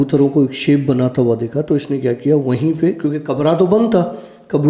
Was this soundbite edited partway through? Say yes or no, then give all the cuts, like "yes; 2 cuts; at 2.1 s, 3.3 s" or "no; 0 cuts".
no; 0 cuts